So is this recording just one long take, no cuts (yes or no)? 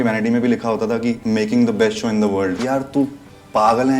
no